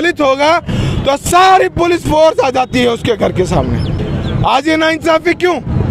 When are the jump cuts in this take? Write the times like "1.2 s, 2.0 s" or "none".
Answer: none